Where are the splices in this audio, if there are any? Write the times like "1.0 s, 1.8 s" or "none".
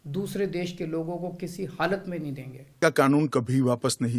2.8 s